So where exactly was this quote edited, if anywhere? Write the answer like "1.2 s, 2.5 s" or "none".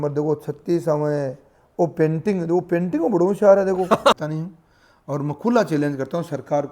4.2 s